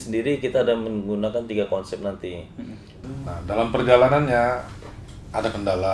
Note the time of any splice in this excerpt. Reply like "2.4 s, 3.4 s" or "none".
3.0 s